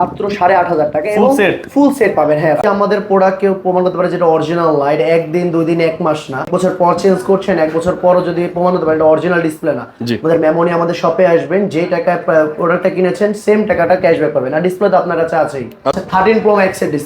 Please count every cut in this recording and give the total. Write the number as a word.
three